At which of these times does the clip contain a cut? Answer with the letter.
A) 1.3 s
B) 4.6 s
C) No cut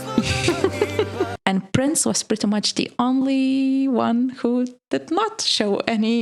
A